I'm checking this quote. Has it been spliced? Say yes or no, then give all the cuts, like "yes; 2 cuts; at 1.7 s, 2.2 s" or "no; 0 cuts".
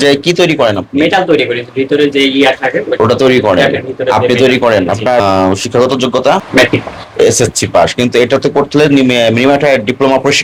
no; 0 cuts